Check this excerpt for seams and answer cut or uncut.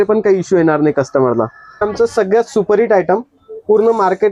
cut